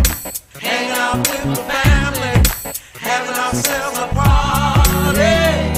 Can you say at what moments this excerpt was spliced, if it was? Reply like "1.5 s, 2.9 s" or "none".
none

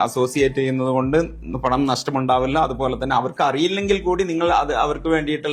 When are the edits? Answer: none

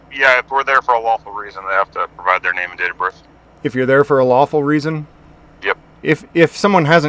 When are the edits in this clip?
5.9 s

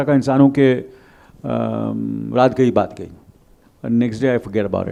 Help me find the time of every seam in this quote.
none

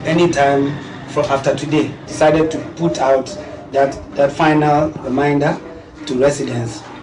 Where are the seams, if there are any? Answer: 2.1 s, 3.6 s

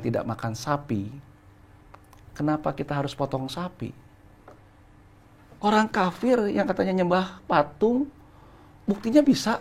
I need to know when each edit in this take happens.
4.4 s

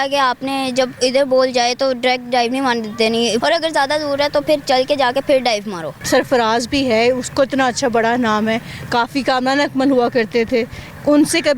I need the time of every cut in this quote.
3.4 s, 6.0 s

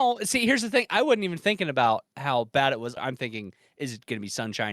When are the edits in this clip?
3.0 s

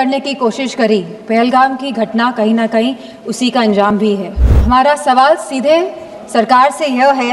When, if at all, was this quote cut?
4.5 s

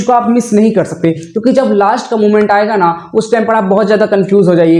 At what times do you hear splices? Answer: none

